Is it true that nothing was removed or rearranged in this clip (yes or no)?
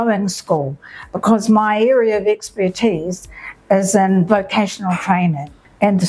yes